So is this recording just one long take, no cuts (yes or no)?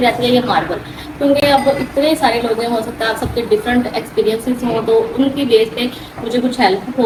yes